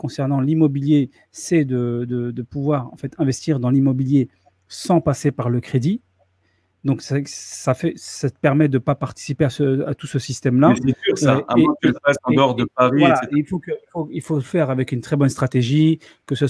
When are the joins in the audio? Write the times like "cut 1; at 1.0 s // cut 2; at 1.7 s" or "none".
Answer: none